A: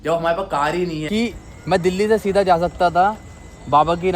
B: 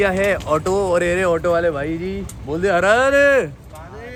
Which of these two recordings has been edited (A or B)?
A